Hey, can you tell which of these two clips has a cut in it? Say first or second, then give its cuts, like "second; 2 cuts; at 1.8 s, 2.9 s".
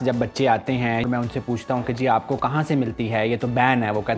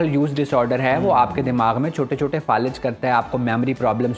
first; 1 cut; at 1.1 s